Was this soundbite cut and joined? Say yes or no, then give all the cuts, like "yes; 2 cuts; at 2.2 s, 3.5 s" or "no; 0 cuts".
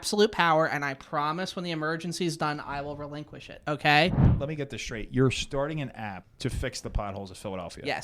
yes; 2 cuts; at 4.3 s, 6.3 s